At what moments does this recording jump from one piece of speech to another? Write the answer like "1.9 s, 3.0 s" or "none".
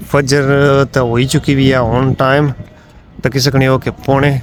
none